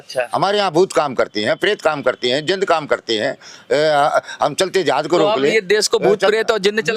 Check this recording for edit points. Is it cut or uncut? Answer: uncut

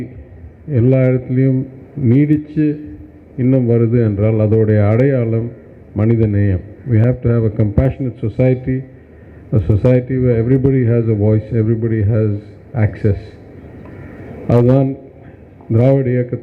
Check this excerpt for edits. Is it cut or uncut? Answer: uncut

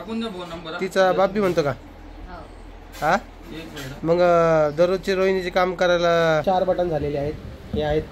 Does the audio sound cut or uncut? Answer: cut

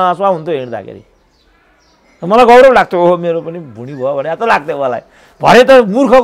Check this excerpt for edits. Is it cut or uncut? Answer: uncut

